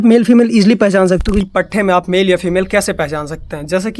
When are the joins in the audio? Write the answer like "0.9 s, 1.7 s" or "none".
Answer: 1.5 s